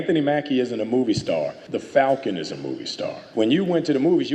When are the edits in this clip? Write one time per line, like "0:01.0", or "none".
0:03.2